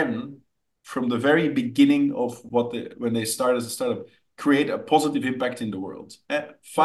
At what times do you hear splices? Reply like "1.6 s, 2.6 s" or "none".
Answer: none